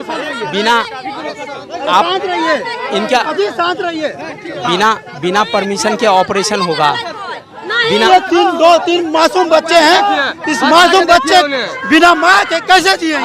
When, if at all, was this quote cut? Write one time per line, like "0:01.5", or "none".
0:08.1